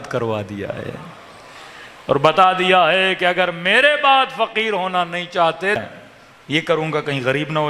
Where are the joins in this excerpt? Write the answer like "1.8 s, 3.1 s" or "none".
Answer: 5.8 s

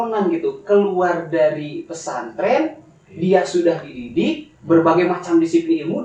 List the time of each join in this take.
none

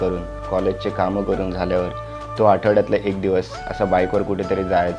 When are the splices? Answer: none

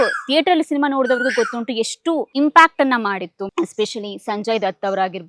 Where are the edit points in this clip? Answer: 2.3 s, 3.3 s

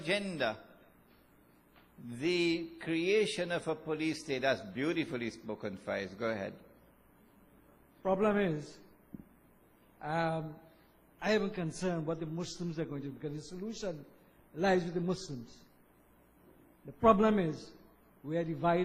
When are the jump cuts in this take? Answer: 8.0 s

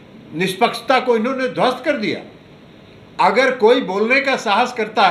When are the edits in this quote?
none

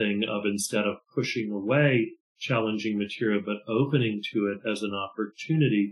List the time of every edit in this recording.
none

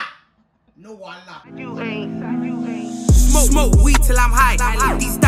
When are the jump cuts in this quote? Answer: 1.4 s

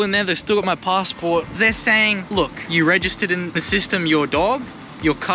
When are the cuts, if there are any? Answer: 1.5 s, 2.6 s, 3.6 s

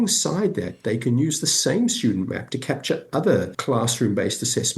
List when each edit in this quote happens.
3.5 s

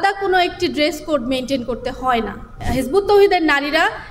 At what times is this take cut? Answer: 2.6 s

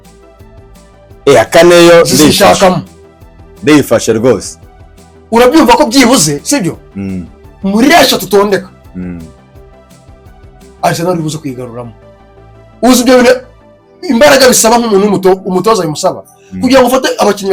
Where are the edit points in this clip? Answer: none

